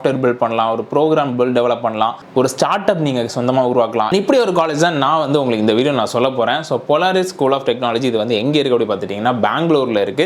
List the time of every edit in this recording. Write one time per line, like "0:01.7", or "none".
none